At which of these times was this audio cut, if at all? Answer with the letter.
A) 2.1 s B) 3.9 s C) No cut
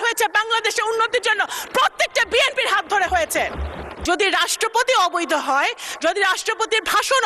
B